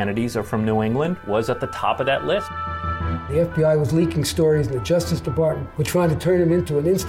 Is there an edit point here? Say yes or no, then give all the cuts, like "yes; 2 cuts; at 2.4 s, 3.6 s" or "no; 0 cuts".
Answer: yes; 2 cuts; at 3.0 s, 5.7 s